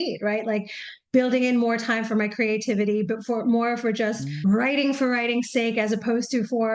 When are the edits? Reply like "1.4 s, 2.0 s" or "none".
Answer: none